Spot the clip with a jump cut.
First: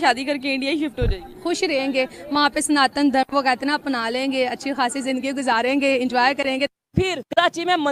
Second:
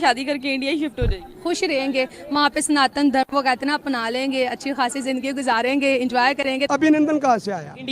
second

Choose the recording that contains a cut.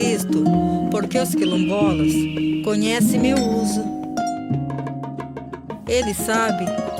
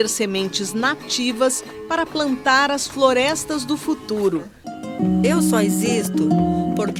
second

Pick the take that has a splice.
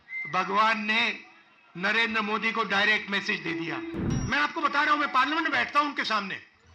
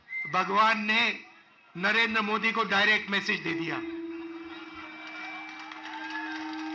first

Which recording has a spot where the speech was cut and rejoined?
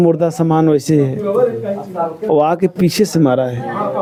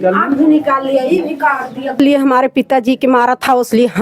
second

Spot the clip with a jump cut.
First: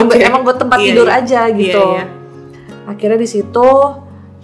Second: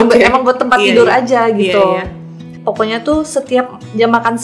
second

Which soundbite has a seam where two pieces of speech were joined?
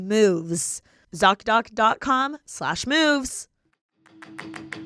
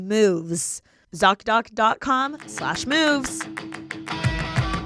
second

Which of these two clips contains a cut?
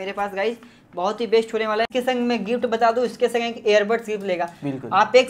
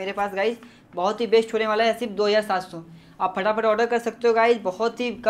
first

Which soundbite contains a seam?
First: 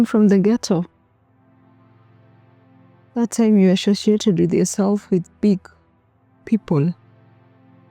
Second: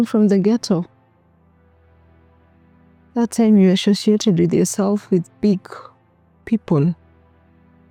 first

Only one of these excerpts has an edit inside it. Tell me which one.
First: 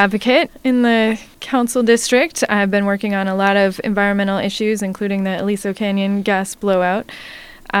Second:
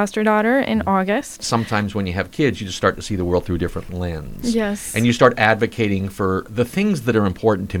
second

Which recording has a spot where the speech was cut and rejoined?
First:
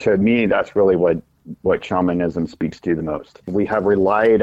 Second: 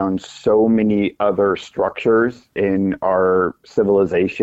first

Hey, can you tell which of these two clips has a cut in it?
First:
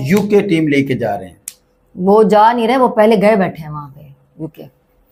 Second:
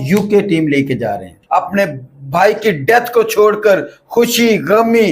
second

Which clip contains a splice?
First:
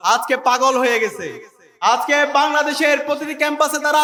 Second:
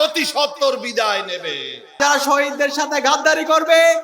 second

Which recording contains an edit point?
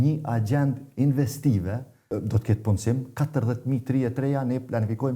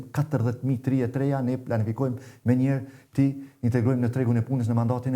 first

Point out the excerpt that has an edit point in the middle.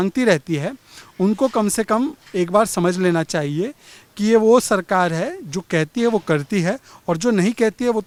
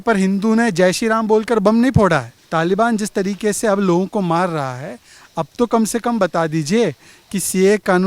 second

